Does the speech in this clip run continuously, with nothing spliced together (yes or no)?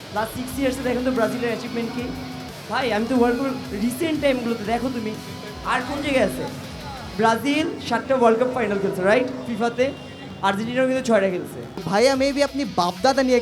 no